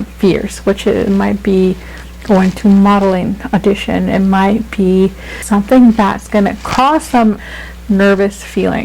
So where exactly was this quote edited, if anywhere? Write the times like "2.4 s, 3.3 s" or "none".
5.4 s, 7.5 s